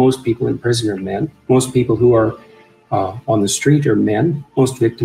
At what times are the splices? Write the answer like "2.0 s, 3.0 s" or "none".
1.3 s

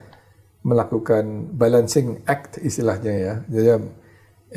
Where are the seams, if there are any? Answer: none

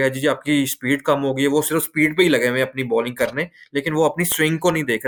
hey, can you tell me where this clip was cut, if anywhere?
none

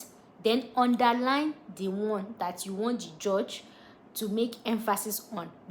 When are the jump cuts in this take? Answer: none

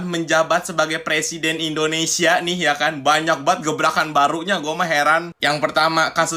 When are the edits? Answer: none

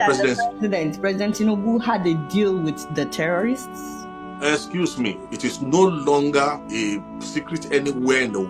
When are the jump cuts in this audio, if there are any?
5.2 s, 6.6 s

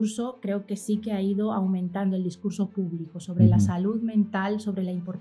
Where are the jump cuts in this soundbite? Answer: none

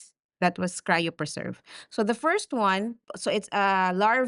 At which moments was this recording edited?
3.1 s

